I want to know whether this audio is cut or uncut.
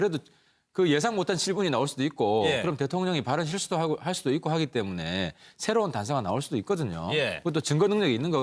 cut